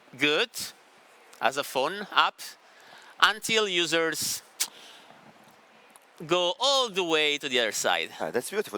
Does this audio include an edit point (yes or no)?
no